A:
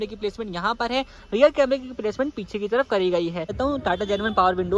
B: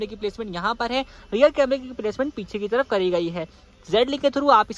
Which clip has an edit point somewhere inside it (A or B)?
A